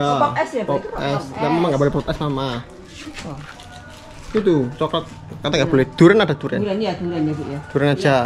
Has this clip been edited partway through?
no; 0 cuts

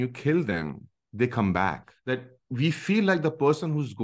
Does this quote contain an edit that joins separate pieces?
yes; 1 cut; at 1.9 s

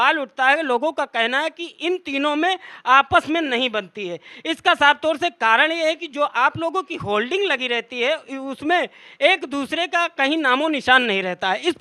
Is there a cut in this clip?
no; 0 cuts

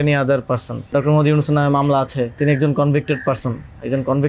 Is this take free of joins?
no; 2 cuts; at 0.9 s, 2.4 s

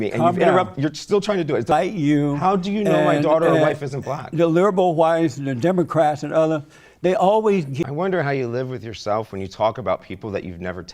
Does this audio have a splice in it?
yes; 2 cuts; at 1.7 s, 7.7 s

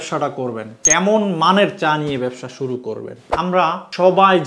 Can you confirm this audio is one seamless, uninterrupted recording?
no; 1 cut; at 3.5 s

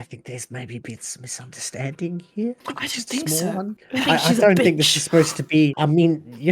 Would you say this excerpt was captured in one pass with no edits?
no; 3 cuts; at 2.6 s, 3.8 s, 5.7 s

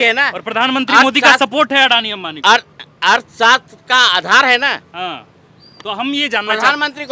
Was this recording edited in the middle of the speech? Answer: no; 0 cuts

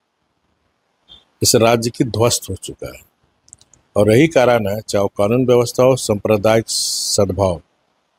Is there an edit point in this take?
no; 0 cuts

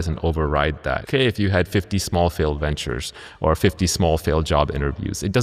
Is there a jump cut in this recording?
yes; 1 cut; at 1.1 s

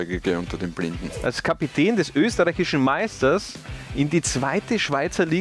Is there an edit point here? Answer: yes; 1 cut; at 1.1 s

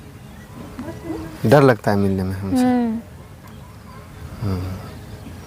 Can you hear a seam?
no; 0 cuts

